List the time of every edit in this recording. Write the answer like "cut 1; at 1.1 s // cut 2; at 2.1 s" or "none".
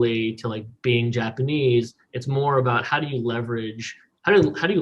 none